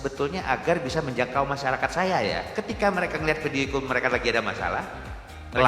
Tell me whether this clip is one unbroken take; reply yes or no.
no